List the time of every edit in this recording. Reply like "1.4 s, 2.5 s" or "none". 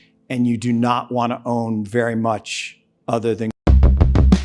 3.5 s